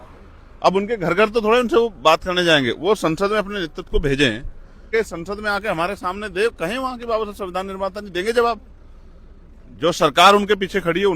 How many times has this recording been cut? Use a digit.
1